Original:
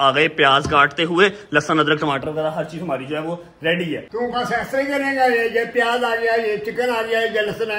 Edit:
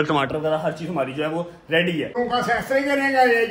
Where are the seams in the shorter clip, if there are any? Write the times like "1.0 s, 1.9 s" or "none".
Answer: 2.1 s